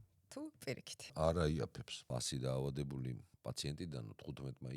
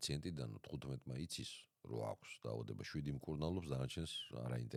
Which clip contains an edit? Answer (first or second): first